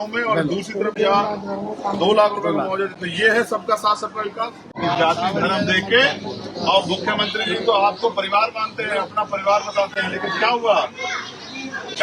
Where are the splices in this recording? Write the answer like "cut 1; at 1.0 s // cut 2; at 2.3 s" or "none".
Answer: cut 1; at 4.6 s